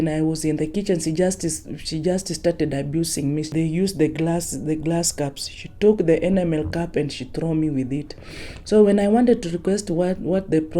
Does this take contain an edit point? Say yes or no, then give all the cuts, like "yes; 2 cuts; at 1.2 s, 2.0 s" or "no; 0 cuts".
yes; 1 cut; at 3.5 s